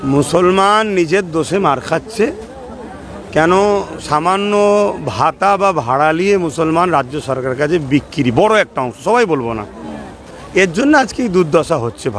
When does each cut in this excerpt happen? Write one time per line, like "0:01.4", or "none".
none